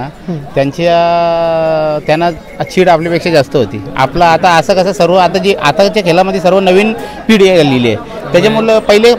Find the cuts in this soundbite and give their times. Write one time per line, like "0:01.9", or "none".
none